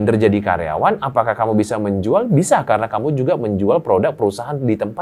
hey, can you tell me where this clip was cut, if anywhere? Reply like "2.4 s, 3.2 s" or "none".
none